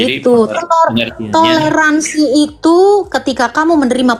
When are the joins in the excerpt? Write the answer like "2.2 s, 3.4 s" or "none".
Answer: none